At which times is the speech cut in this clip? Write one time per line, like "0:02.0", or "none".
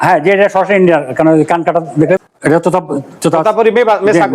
0:02.2